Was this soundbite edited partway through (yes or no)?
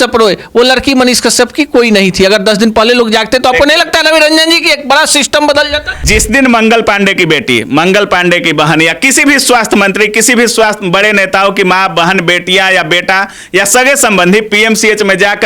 yes